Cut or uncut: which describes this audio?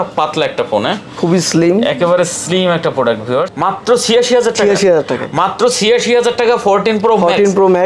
cut